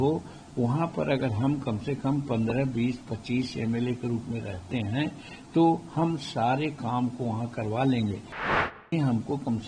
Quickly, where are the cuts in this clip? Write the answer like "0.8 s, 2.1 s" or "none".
8.7 s